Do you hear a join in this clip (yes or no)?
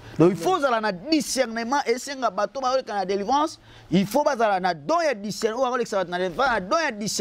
no